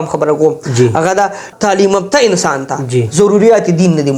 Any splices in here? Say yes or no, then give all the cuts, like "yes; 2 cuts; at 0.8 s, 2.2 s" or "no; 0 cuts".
yes; 1 cut; at 1.5 s